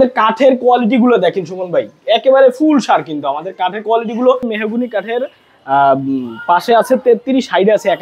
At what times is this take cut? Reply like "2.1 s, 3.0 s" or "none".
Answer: 4.5 s